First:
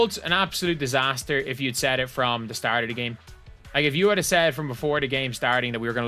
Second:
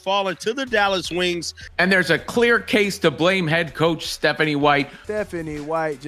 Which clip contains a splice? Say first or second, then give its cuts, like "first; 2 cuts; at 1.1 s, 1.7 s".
second; 2 cuts; at 1.6 s, 4.9 s